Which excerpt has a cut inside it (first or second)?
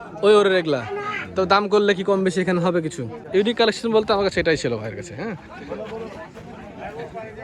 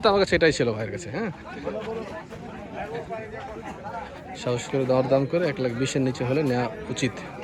first